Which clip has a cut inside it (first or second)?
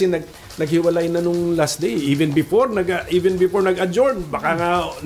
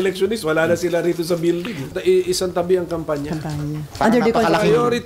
second